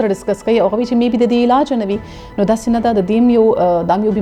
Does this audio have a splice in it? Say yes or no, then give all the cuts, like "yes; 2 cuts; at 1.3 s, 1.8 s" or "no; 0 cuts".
no; 0 cuts